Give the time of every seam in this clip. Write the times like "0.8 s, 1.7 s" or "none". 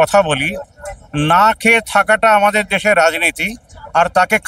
none

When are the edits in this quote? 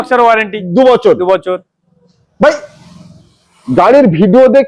none

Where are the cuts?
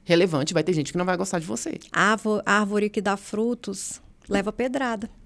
none

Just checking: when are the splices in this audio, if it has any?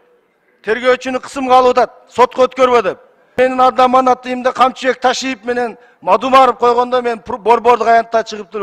3.3 s

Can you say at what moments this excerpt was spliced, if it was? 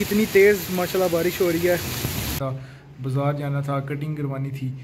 2.3 s

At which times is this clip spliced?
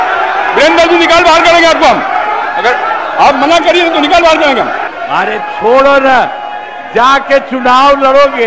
4.9 s

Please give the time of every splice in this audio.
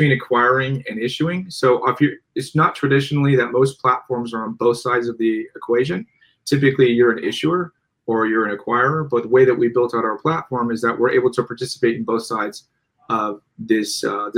none

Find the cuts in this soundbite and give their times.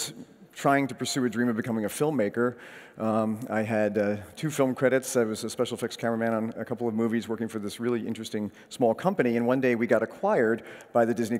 4.3 s

